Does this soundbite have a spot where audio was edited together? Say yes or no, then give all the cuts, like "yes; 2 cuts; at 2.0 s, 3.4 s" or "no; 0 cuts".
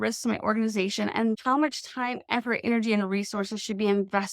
yes; 1 cut; at 1.4 s